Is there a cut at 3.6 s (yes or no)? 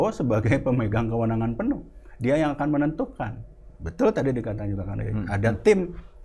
no